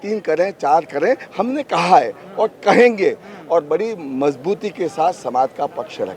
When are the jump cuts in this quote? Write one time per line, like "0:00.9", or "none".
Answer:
none